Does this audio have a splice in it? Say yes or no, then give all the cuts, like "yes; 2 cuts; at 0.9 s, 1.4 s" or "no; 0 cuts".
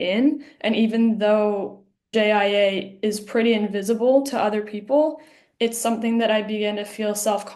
yes; 1 cut; at 2.1 s